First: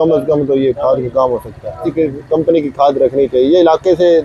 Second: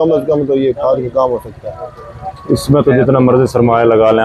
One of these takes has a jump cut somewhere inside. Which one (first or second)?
first